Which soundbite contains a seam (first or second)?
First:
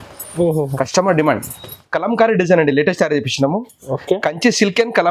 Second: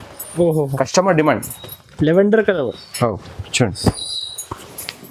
first